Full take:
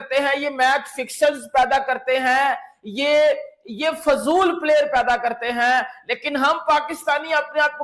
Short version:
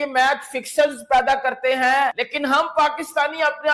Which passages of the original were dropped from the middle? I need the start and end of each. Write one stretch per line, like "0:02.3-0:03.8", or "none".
0:02.7-0:06.2